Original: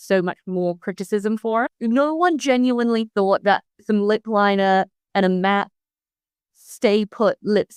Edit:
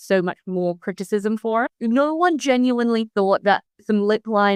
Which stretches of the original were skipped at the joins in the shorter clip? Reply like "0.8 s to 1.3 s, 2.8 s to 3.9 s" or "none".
none